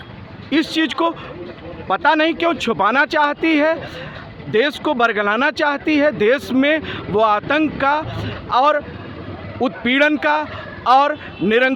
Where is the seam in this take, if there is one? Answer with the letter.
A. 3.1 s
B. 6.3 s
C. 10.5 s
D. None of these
D